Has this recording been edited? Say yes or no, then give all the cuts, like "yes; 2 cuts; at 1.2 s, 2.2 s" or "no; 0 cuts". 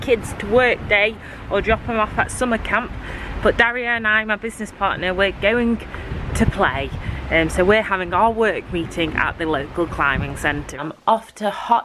yes; 1 cut; at 10.8 s